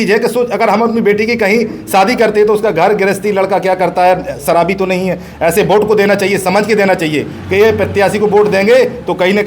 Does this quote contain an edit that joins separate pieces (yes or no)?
no